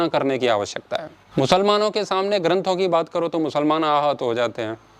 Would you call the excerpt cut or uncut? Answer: cut